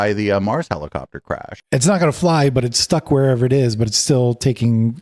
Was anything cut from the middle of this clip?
yes; 1 cut; at 1.5 s

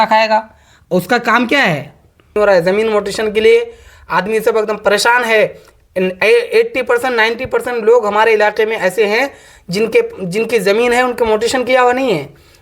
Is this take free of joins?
no; 1 cut; at 2.4 s

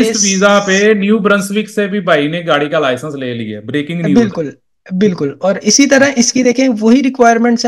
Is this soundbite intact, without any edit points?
yes; 0 cuts

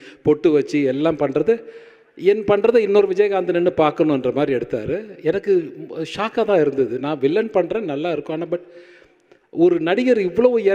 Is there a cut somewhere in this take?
no; 0 cuts

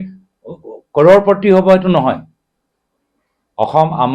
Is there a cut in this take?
no; 0 cuts

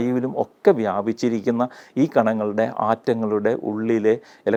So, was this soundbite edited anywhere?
no; 0 cuts

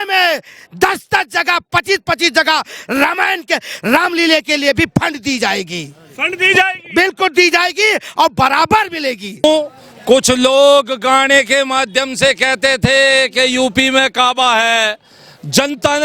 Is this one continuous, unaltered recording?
no; 1 cut; at 9.4 s

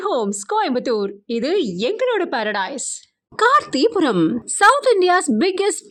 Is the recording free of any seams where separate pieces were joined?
yes; 0 cuts

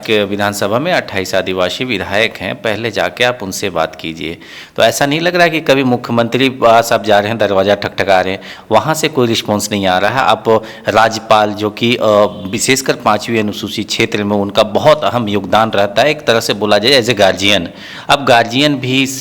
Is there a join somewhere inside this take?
no; 0 cuts

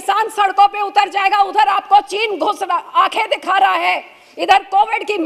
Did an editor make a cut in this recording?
no; 0 cuts

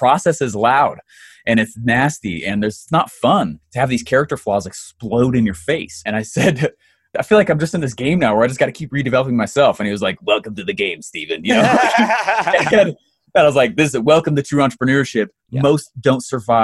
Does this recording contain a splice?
yes; 4 cuts; at 2.8 s, 3.6 s, 6.0 s, 7.1 s

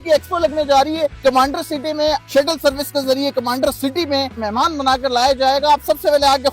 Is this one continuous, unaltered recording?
no; 3 cuts; at 1.2 s, 2.2 s, 4.4 s

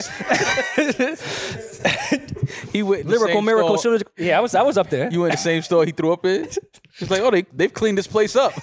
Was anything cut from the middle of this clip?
no; 0 cuts

